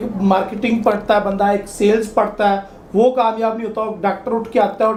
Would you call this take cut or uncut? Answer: uncut